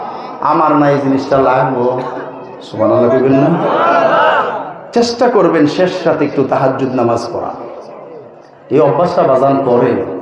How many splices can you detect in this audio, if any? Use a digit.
0